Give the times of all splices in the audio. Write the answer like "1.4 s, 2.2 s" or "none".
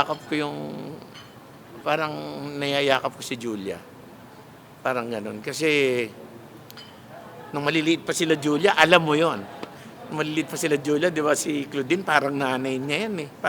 none

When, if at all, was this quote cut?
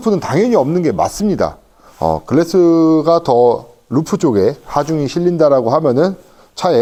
none

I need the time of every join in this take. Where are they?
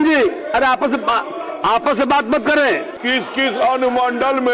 2.9 s

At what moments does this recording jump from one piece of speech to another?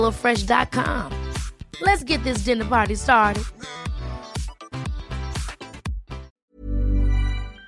6.4 s

